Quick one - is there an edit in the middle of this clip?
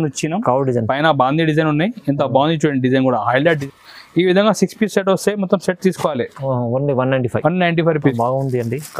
yes; 2 cuts; at 3.4 s, 8.0 s

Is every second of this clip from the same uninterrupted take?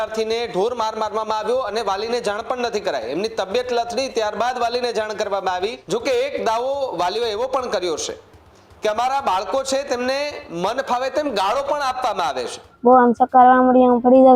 no; 2 cuts; at 5.8 s, 12.6 s

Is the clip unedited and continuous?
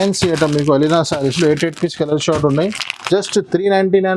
yes; 0 cuts

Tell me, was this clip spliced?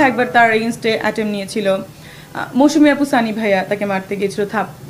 no; 0 cuts

